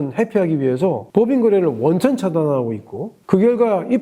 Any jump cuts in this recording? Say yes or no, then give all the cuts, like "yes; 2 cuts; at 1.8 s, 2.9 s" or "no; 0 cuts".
yes; 1 cut; at 1.0 s